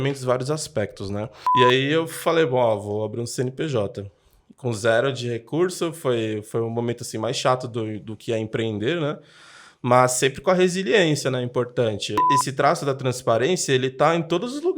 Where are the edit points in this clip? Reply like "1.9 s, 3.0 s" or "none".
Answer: 1.4 s, 12.2 s